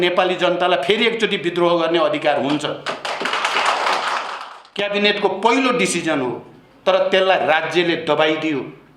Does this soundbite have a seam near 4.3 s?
yes; 1 cut; at 4.3 s

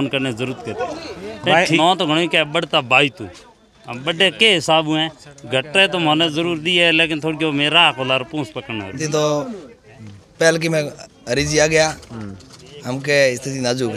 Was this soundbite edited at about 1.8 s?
yes; 2 cuts; at 1.8 s, 9.0 s

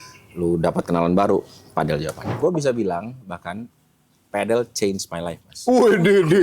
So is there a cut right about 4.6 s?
no; 1 cut; at 2.3 s

